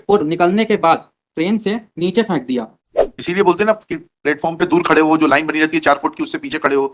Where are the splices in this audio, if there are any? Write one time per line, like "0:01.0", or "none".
0:02.8